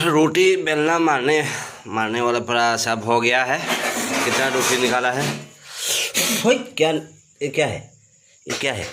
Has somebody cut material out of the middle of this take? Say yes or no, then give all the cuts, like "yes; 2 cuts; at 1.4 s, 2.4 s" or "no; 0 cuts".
no; 0 cuts